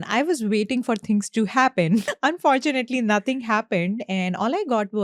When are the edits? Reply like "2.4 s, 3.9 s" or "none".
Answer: 2.1 s